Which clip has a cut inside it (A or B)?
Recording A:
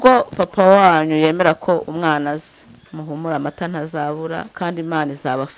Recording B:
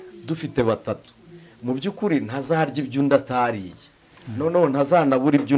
A